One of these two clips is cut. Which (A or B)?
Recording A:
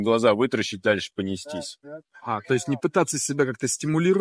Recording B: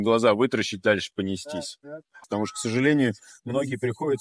B